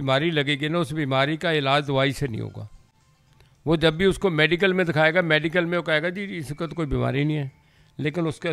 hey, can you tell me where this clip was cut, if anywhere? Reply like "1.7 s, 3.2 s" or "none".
none

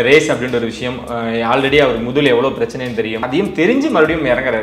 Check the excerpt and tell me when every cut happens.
3.2 s

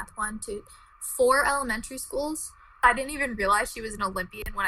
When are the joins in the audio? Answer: 2.8 s

